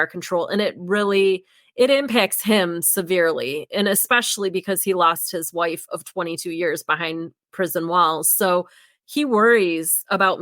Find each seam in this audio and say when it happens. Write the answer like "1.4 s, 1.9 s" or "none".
7.3 s